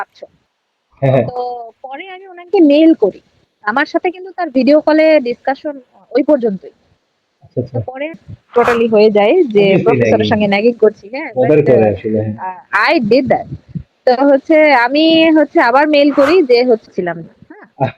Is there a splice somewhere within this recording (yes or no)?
yes